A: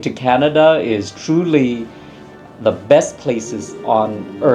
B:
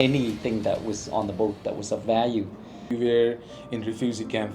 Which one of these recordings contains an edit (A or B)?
B